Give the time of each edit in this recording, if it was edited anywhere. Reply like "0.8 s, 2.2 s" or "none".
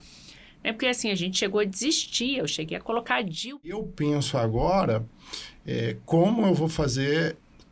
3.8 s